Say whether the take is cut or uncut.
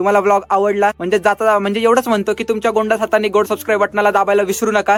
uncut